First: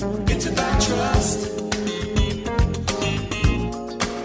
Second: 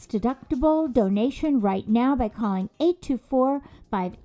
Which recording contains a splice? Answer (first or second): first